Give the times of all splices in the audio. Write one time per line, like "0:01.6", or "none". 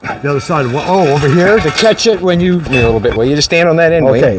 0:02.7